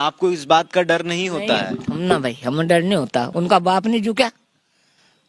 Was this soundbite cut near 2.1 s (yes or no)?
no